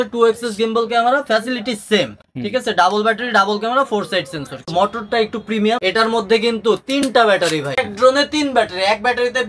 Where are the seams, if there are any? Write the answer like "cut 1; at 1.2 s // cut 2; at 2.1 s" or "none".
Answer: cut 1; at 4.7 s // cut 2; at 5.8 s // cut 3; at 7.8 s